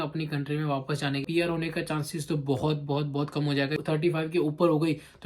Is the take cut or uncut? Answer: cut